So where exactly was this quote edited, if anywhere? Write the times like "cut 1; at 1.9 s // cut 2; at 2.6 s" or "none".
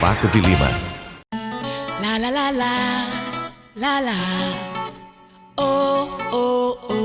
cut 1; at 1.0 s